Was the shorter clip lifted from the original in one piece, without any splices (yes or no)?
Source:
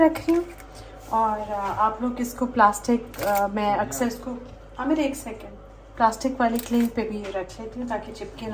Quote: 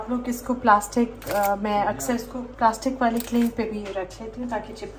no